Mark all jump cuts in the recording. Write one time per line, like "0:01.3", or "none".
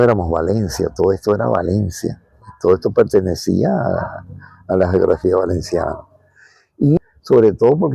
0:07.0